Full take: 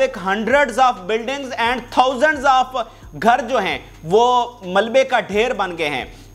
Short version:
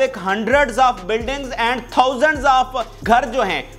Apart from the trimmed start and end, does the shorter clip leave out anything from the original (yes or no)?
yes